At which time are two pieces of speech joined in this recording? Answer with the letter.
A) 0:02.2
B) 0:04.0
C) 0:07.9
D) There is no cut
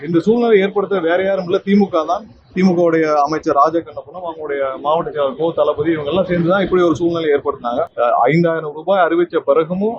C